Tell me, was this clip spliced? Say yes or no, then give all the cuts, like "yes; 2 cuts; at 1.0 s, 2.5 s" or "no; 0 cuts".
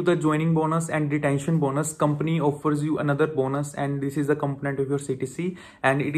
no; 0 cuts